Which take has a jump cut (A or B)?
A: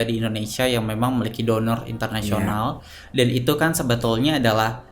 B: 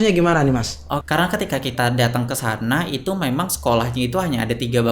B